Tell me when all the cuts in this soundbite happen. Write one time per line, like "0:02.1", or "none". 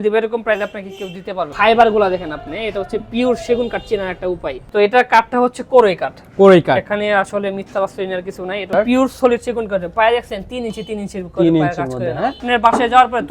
0:01.5
0:04.6
0:08.7
0:12.4